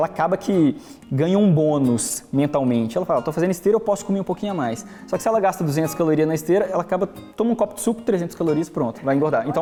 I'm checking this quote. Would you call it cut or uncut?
uncut